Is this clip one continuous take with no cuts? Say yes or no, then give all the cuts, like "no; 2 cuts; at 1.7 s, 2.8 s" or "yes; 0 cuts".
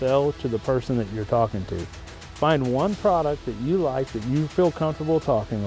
yes; 0 cuts